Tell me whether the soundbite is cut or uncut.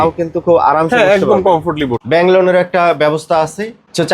cut